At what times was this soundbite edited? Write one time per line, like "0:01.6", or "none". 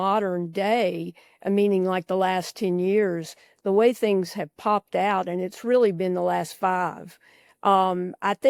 none